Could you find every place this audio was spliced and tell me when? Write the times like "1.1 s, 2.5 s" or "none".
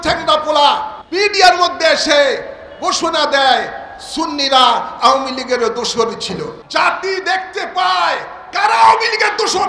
1.0 s, 6.6 s